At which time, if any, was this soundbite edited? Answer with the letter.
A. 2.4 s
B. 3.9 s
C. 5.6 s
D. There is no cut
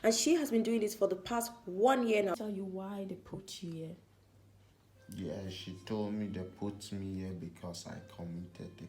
A